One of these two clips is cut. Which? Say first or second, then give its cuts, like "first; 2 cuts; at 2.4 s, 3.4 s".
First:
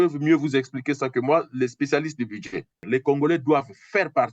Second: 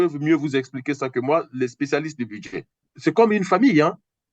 first; 1 cut; at 2.7 s